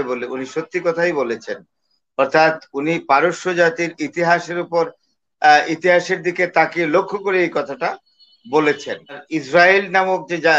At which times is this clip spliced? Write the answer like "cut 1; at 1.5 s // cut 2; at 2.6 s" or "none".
cut 1; at 9.3 s